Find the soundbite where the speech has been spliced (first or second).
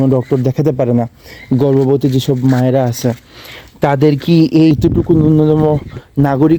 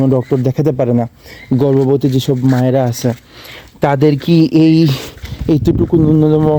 first